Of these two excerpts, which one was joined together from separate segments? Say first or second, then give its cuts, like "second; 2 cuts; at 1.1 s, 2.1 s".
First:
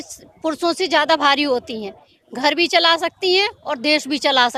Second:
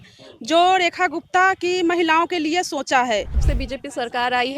second; 1 cut; at 3.4 s